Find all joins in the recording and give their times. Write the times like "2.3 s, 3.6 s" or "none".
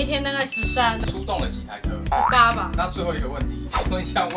1.0 s